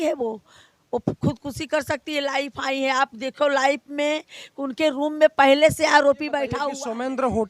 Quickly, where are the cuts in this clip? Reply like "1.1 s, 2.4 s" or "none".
6.5 s